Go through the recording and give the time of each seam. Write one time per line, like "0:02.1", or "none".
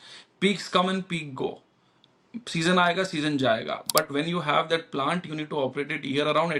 none

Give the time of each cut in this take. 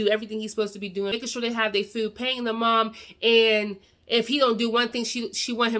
0:01.1

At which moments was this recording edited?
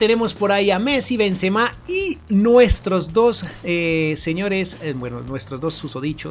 none

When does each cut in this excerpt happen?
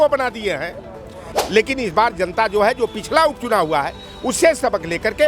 0:01.0

